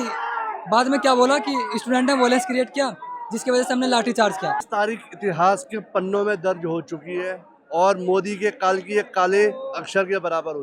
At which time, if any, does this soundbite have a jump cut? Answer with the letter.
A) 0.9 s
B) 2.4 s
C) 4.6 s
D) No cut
C